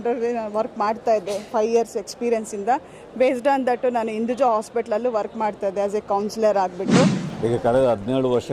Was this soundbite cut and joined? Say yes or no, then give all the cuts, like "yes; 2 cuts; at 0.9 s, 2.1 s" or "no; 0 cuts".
yes; 1 cut; at 7.2 s